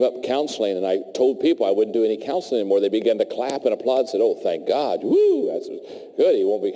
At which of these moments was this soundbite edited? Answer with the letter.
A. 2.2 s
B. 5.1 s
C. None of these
B